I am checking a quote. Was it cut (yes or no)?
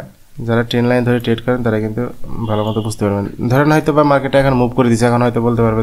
no